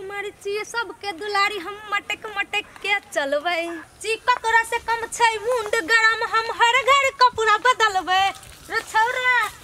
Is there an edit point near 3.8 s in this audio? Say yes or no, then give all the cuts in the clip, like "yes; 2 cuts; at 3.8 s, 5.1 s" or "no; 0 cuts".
yes; 1 cut; at 3.8 s